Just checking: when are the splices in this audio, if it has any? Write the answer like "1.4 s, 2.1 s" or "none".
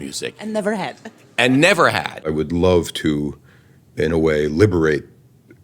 2.3 s